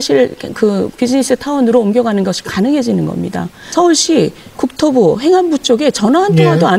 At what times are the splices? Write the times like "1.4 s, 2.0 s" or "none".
3.7 s